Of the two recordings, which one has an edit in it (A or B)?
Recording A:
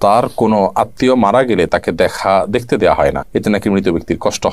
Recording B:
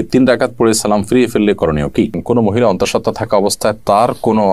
B